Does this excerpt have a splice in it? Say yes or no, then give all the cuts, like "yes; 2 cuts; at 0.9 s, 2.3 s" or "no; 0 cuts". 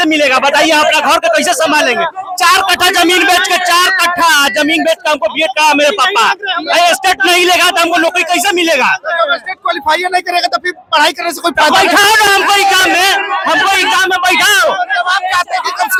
no; 0 cuts